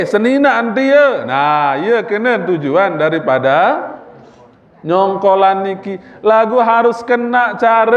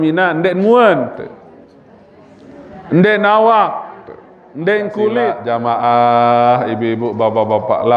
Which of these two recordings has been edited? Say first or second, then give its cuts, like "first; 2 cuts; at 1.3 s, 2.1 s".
second; 1 cut; at 5.4 s